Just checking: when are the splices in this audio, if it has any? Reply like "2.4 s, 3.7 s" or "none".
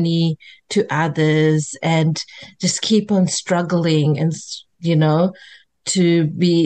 none